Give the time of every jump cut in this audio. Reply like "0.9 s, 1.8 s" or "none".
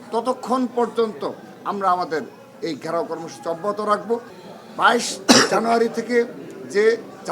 4.4 s